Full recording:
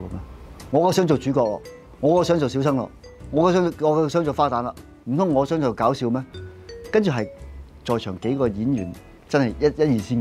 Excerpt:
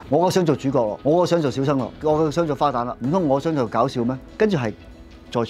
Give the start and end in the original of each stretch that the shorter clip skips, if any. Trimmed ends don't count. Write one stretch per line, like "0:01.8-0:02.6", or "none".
0:01.6-0:01.9
0:02.9-0:03.7
0:04.7-0:05.0
0:06.3-0:06.8